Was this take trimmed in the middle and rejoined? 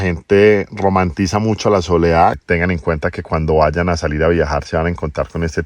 yes; 1 cut; at 2.4 s

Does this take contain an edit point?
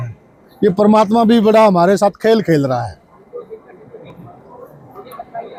no; 0 cuts

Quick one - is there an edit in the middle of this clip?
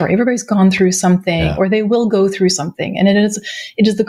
no; 0 cuts

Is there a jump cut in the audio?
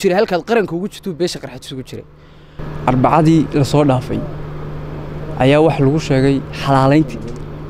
yes; 1 cut; at 2.6 s

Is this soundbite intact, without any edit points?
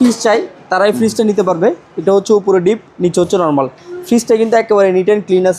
yes; 0 cuts

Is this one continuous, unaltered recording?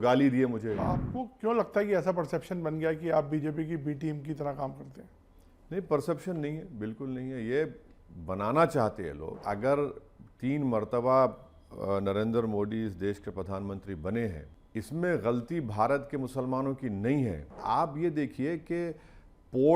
no; 4 cuts; at 0.8 s, 9.4 s, 14.5 s, 17.6 s

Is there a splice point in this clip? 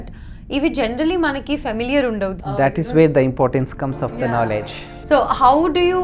yes; 1 cut; at 2.5 s

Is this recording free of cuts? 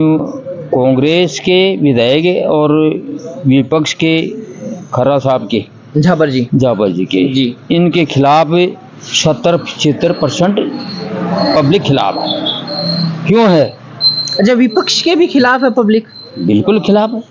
yes; 0 cuts

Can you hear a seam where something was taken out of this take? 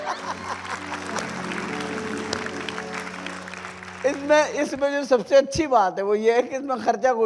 no; 0 cuts

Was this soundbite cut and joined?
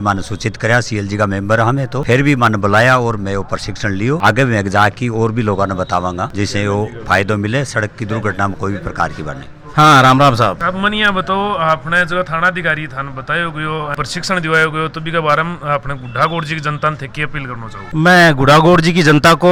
no; 0 cuts

